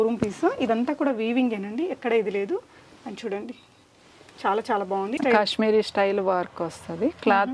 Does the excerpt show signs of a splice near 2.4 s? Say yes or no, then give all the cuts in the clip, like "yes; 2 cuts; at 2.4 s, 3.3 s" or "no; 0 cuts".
no; 1 cut; at 5.2 s